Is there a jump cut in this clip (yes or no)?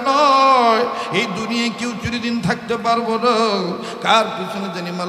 no